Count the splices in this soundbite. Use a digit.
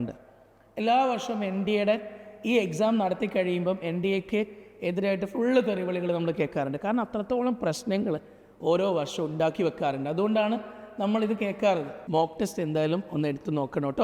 1